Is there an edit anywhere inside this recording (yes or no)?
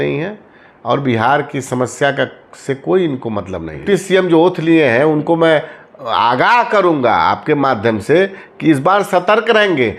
yes